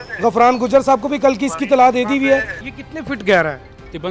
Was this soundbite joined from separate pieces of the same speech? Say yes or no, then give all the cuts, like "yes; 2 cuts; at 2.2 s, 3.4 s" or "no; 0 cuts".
yes; 1 cut; at 2.5 s